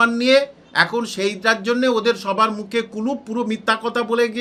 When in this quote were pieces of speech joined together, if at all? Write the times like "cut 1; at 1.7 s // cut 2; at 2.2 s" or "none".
none